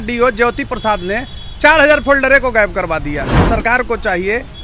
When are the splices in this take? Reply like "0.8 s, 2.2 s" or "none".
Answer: 3.3 s